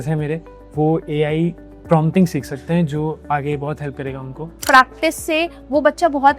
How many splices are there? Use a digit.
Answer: 1